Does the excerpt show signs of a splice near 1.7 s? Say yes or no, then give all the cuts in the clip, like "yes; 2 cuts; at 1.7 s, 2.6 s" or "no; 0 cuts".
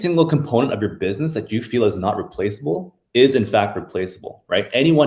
no; 0 cuts